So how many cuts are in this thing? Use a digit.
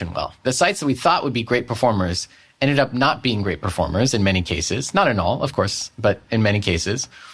0